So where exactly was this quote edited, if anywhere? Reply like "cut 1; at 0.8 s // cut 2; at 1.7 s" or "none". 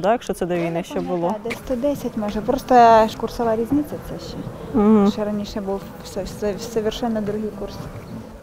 cut 1; at 3.1 s